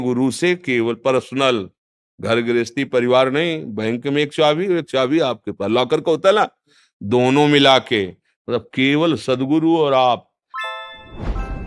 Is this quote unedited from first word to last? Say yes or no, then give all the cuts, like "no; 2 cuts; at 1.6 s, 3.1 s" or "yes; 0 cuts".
no; 1 cut; at 10.4 s